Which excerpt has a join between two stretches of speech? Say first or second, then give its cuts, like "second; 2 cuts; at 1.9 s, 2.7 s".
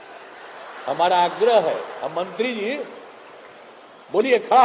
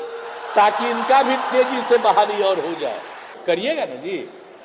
second; 1 cut; at 3.4 s